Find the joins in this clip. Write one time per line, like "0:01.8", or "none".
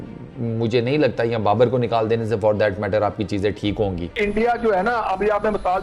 0:04.2